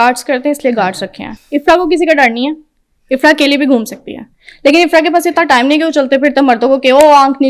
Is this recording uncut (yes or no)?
yes